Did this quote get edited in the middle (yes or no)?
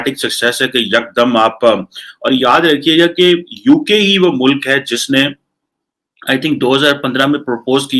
no